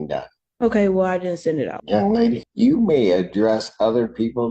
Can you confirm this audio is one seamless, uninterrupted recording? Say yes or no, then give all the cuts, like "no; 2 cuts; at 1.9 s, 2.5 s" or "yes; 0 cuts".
no; 2 cuts; at 1.8 s, 2.5 s